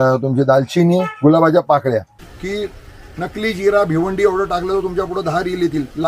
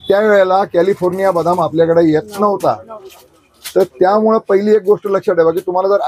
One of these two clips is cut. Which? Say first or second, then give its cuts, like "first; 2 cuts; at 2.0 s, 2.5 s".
first; 1 cut; at 2.2 s